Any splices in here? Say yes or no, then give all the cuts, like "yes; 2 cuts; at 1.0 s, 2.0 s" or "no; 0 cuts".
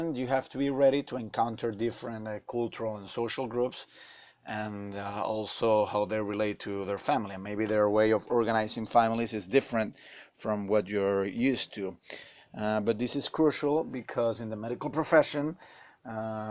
yes; 1 cut; at 13.6 s